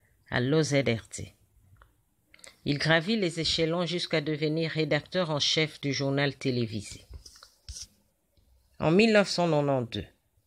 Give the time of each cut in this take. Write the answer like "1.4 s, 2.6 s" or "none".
none